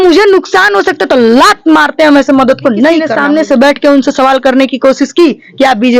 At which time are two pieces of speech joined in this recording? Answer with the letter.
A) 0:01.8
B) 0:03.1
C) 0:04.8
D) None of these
B